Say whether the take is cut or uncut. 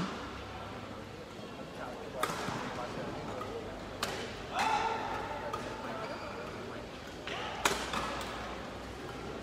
uncut